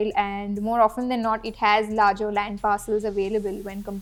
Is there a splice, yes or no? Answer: no